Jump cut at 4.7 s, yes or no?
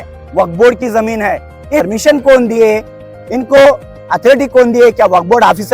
no